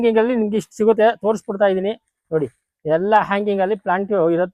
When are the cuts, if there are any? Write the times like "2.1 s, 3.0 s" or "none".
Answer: none